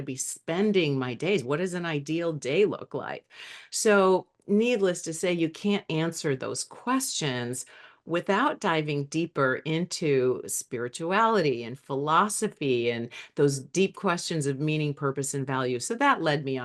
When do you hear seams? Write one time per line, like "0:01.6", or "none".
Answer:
none